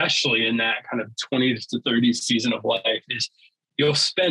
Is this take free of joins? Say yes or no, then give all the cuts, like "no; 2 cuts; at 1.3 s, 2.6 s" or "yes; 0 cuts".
yes; 0 cuts